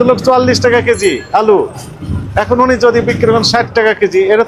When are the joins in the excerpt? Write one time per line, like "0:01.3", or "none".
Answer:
none